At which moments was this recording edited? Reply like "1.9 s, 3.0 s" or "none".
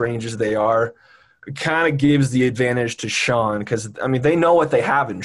none